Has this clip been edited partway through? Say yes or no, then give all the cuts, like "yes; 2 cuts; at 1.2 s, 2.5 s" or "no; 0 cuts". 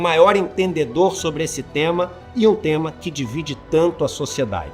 no; 0 cuts